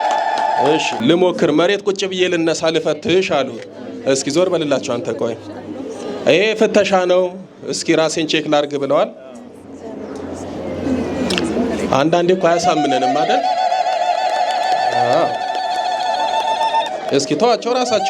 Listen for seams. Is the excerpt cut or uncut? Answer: cut